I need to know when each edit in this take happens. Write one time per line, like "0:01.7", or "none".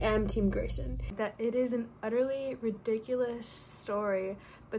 0:01.1